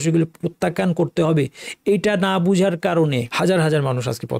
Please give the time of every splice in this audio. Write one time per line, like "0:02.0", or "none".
0:03.3

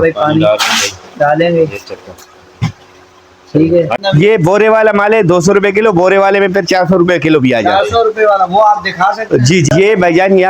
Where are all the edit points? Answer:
0:03.9
0:09.7

